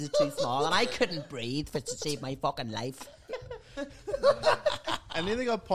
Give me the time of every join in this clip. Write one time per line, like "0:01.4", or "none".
none